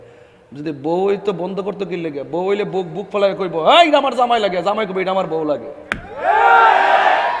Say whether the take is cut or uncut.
uncut